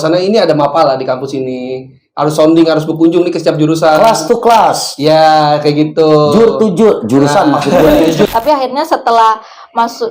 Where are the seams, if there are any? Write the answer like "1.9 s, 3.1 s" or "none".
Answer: 8.3 s